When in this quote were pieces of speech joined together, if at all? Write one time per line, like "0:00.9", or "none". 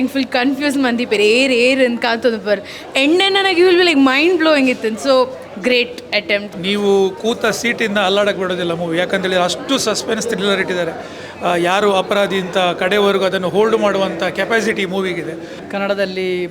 0:06.5
0:15.5

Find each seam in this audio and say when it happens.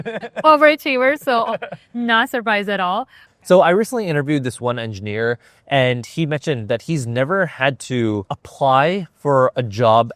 0:03.2
0:08.4

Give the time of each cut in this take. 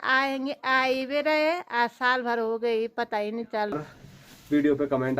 0:03.7

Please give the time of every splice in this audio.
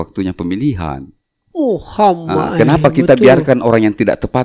none

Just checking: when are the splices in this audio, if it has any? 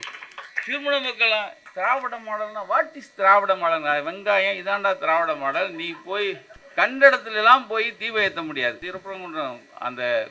0:06.5
0:08.9

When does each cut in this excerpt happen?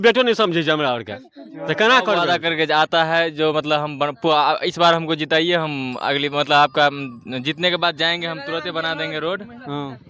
0:02.2

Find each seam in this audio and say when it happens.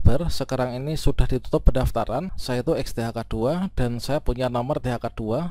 0:02.4

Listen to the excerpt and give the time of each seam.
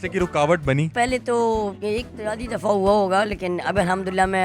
0:00.9

